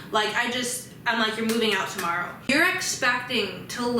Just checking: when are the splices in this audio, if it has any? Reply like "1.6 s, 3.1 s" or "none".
2.5 s